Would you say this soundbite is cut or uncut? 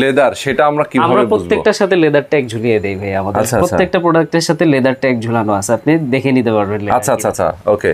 uncut